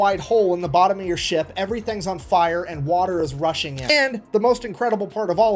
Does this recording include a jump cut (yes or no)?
yes